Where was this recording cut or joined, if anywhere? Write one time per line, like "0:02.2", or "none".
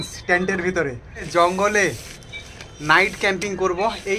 0:01.3